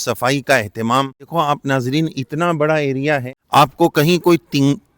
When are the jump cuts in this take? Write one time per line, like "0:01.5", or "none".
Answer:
0:01.3
0:03.3